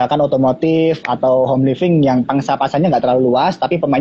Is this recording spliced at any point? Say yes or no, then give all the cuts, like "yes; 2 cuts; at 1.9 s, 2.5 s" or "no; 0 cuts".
no; 0 cuts